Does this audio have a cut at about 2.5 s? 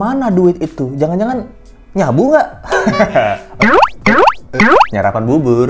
no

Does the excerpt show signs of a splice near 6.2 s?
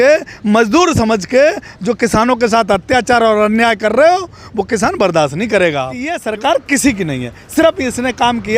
yes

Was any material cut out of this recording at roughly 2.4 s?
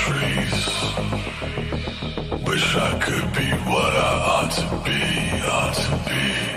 yes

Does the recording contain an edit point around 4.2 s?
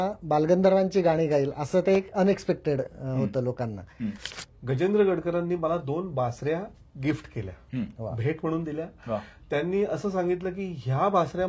yes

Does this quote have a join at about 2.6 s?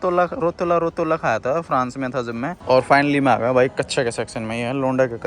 yes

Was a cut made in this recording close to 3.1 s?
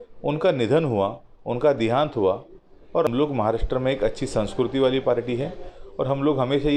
yes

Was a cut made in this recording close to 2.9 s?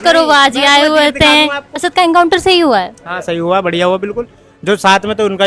no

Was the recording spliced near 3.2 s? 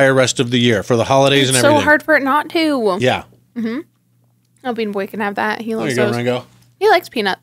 no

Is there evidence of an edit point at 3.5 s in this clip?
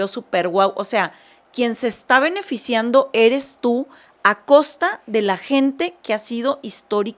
no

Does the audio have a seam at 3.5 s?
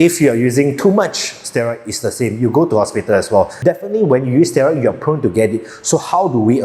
yes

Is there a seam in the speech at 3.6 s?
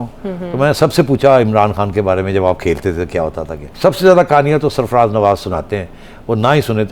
yes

